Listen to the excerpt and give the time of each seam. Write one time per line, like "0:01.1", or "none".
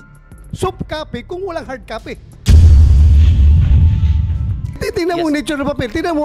0:02.3